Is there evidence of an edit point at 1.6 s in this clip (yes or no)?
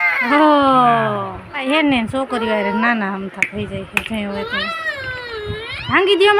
yes